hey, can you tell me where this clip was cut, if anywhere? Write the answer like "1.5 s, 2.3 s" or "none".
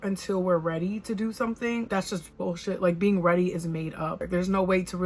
1.9 s, 4.1 s

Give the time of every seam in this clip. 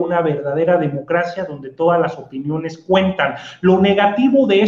none

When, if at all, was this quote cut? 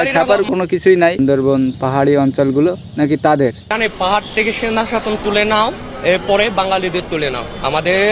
1.2 s

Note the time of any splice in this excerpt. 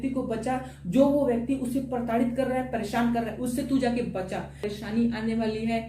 4.6 s

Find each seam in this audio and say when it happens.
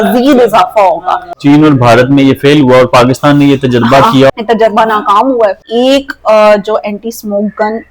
1.3 s, 4.3 s, 5.6 s

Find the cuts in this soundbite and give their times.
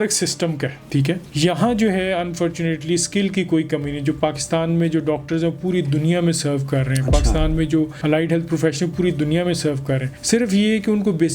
1.3 s, 8.0 s, 10.1 s

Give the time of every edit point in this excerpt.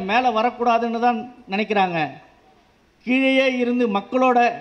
none

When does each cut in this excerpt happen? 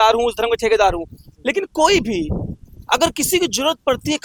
none

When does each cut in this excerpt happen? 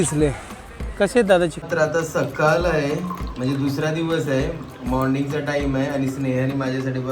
1.6 s

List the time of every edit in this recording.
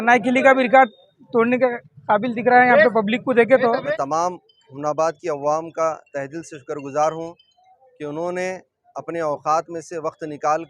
3.9 s

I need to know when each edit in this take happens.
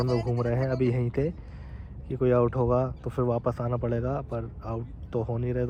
none

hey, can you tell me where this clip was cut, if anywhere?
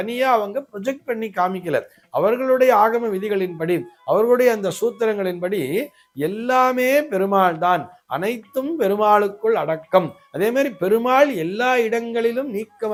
none

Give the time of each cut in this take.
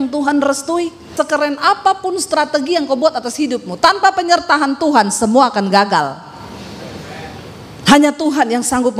1.1 s

